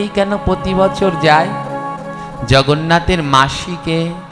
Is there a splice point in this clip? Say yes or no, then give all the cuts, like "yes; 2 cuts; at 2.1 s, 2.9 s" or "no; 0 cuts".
no; 0 cuts